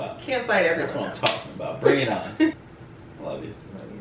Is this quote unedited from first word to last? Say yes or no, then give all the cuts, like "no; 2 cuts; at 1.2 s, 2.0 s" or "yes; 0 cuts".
no; 1 cut; at 2.5 s